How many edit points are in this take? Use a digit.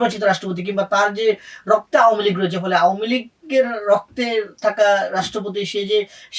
0